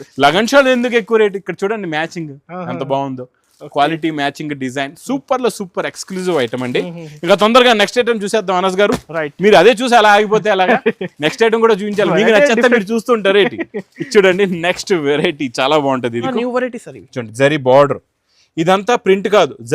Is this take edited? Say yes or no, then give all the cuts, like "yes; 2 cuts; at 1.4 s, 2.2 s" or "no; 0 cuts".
yes; 1 cut; at 16.3 s